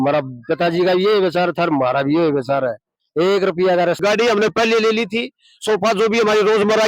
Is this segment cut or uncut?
cut